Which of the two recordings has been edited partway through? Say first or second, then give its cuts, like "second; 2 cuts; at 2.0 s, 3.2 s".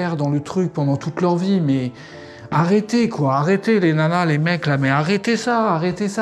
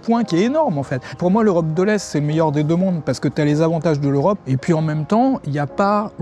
second; 2 cuts; at 1.1 s, 4.4 s